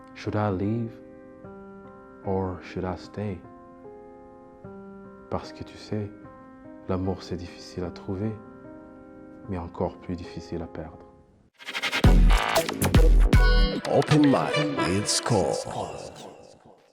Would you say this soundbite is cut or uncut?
cut